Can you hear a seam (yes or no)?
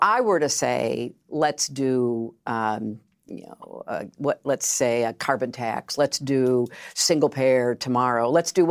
no